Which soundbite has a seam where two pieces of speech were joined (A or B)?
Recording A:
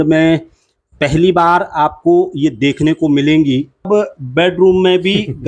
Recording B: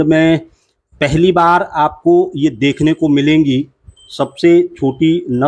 A